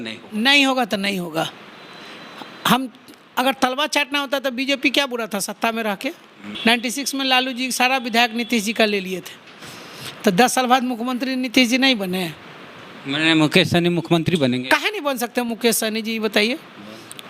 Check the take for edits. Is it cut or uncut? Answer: cut